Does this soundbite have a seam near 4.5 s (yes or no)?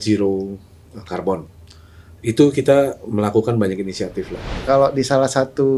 yes